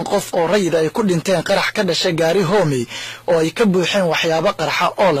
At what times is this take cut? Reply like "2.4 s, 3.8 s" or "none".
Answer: none